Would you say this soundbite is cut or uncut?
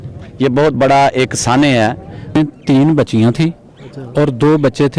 cut